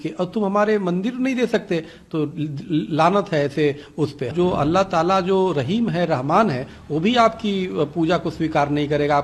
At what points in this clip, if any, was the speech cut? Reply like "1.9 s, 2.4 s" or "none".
4.3 s